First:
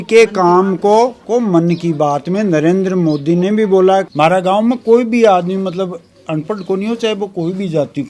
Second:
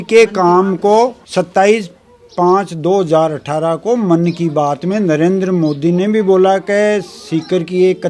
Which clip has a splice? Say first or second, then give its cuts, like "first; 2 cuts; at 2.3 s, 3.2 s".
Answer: first; 2 cuts; at 1.2 s, 4.1 s